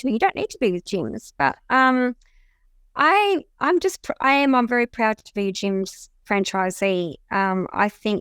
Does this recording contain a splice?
no; 0 cuts

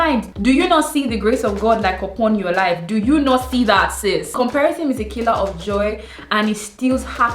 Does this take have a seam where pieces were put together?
yes; 1 cut; at 4.3 s

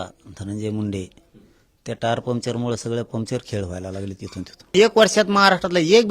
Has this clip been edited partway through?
yes; 1 cut; at 4.7 s

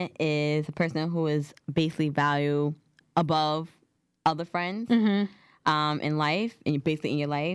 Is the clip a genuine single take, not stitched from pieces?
no; 1 cut; at 3.0 s

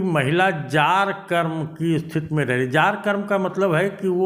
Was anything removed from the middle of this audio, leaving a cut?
no; 0 cuts

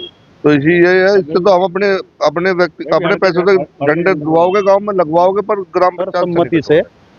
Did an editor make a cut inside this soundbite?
yes; 1 cut; at 6.2 s

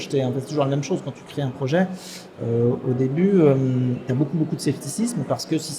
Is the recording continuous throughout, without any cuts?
yes; 0 cuts

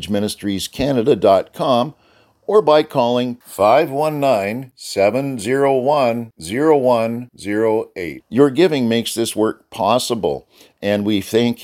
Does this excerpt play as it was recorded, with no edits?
yes; 0 cuts

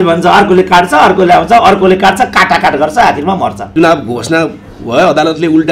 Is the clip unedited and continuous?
no; 1 cut; at 3.6 s

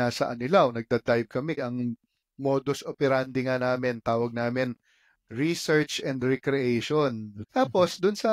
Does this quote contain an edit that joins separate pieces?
yes; 2 cuts; at 1.6 s, 7.4 s

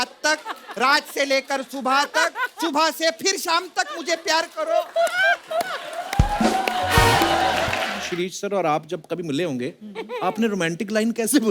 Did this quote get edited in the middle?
yes; 1 cut; at 8.0 s

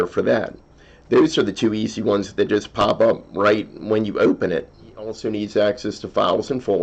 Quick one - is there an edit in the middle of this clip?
yes; 1 cut; at 5.2 s

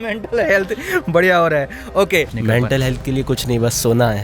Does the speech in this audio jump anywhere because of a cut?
yes; 1 cut; at 2.3 s

